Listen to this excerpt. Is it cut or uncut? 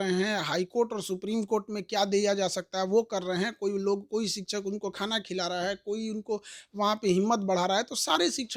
uncut